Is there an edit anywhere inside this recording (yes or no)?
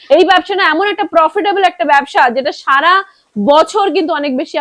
no